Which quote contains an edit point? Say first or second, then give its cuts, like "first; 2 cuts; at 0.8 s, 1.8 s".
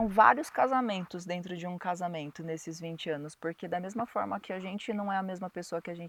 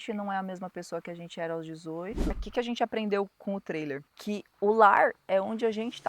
second; 2 cuts; at 2.3 s, 4.5 s